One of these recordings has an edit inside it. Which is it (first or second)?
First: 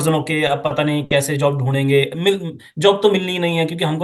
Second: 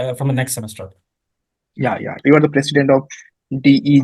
second